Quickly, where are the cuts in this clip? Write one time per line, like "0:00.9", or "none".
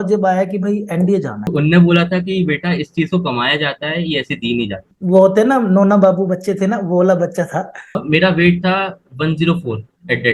0:01.5
0:04.9
0:08.0